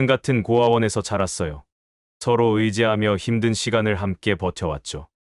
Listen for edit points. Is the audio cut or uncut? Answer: uncut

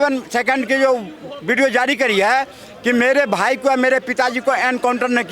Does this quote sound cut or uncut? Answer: uncut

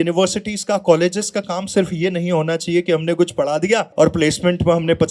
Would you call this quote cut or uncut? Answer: cut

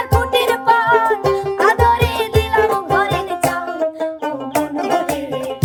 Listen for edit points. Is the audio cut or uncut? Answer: uncut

